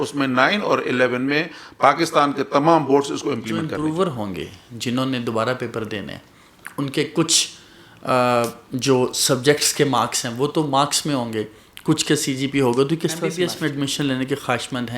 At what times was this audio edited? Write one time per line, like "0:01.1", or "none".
0:03.7
0:13.3